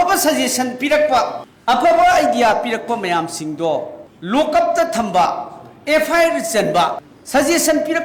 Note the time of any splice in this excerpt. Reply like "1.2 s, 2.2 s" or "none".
none